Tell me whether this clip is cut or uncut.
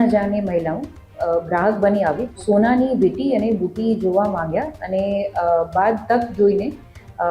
cut